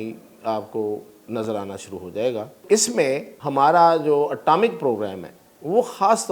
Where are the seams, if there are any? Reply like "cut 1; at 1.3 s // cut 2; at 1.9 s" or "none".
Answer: cut 1; at 2.6 s // cut 2; at 3.3 s